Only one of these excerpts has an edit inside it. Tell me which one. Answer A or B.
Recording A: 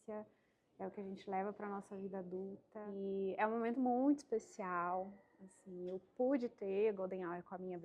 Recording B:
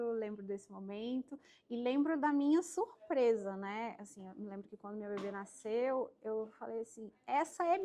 A